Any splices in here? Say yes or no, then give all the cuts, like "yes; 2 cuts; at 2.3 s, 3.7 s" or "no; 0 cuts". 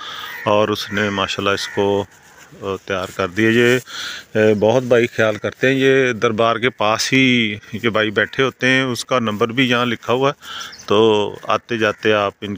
no; 0 cuts